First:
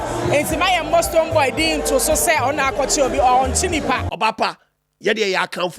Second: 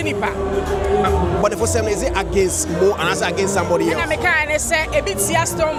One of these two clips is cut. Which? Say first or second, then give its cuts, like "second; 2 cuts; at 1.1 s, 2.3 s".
first; 1 cut; at 4.1 s